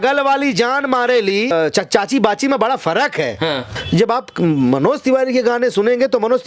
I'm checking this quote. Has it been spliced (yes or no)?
yes